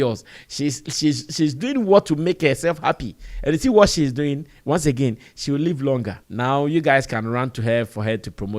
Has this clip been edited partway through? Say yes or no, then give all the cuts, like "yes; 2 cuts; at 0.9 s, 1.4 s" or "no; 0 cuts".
yes; 1 cut; at 6.2 s